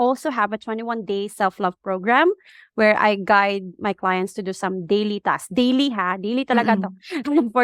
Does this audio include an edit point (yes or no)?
no